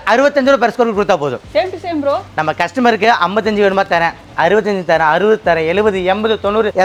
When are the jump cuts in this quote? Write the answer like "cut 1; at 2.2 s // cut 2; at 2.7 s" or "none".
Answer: none